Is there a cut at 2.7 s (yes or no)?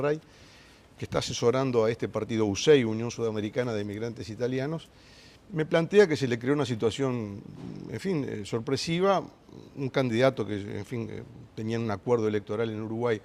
no